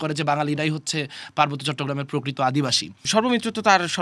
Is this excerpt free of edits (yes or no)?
no